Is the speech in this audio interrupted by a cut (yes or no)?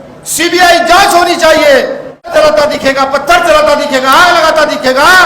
yes